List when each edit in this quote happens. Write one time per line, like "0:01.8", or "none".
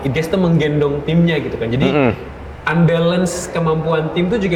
none